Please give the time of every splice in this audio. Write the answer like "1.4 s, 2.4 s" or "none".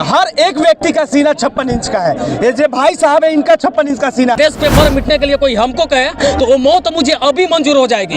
4.4 s